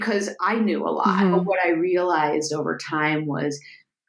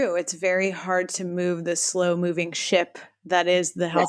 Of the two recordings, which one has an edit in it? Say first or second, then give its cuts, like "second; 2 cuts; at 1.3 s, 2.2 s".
first; 1 cut; at 1.1 s